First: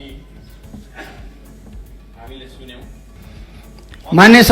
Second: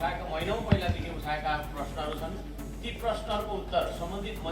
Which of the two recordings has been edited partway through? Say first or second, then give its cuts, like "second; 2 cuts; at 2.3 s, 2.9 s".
first; 1 cut; at 3.2 s